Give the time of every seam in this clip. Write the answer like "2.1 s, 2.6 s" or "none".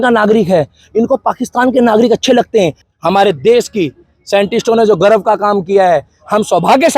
2.8 s